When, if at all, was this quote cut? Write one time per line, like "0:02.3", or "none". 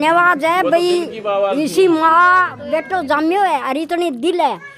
none